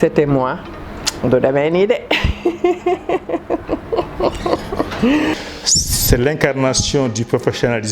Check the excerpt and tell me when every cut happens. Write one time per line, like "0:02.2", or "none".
0:05.3